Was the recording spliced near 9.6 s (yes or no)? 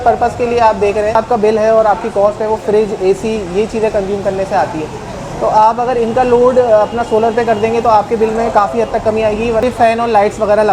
yes